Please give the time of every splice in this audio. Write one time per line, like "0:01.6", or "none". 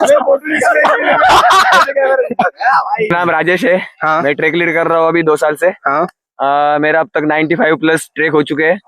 0:03.1